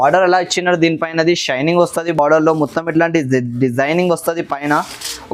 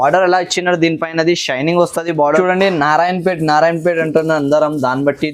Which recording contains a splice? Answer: second; 1 cut; at 2.1 s

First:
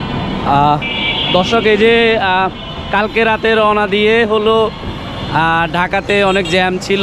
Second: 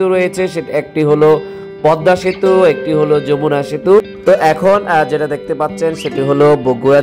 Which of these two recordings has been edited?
second; 1 cut; at 4.1 s

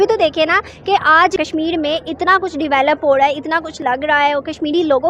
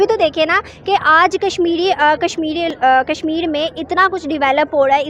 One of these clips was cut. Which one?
first; 1 cut; at 1.4 s

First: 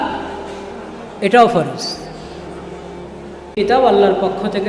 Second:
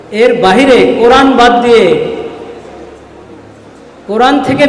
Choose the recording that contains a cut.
first; 1 cut; at 3.6 s

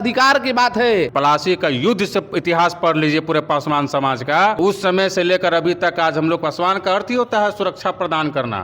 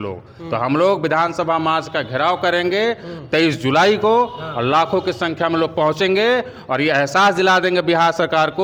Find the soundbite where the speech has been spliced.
first; 2 cuts; at 1.1 s, 4.6 s

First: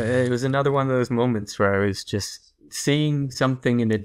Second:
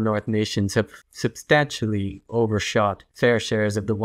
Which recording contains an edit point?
second; 2 cuts; at 1.0 s, 3.1 s

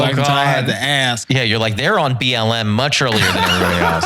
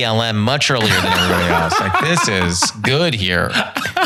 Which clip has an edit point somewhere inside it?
first; 1 cut; at 1.2 s

